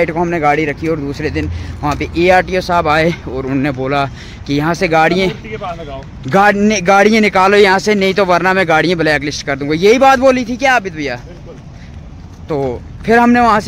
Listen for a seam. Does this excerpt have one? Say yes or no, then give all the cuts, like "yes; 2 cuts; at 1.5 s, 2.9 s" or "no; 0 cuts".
no; 0 cuts